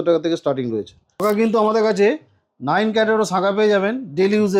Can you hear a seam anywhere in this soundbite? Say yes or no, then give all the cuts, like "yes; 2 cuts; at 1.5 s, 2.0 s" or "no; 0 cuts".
yes; 1 cut; at 1.2 s